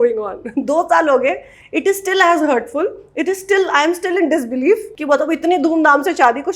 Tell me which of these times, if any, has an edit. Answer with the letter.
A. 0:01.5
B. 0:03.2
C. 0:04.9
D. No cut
C